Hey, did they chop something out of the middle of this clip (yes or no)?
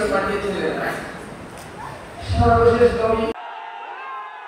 yes